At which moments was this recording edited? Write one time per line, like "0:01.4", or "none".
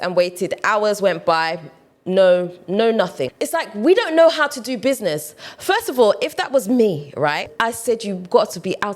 0:03.4
0:07.5